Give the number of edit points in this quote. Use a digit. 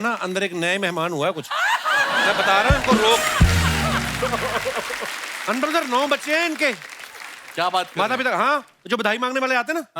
0